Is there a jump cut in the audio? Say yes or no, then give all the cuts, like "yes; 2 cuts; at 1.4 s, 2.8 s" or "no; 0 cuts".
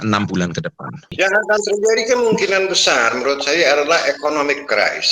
yes; 1 cut; at 1.1 s